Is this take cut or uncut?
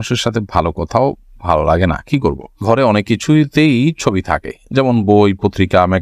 cut